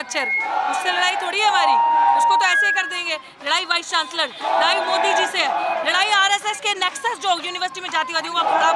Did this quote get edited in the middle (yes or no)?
no